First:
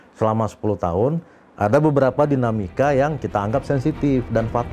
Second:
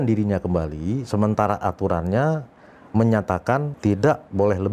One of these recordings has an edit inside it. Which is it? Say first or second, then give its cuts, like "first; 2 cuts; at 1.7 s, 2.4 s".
second; 1 cut; at 3.7 s